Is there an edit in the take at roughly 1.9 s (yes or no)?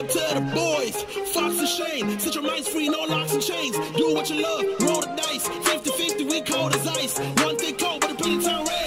yes